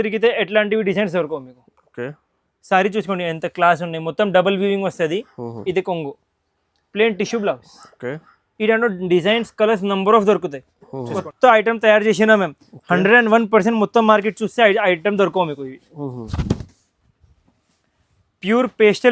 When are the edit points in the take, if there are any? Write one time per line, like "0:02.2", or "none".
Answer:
0:11.2